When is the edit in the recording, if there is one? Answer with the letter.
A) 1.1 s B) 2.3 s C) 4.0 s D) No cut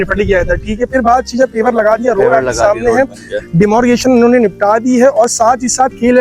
D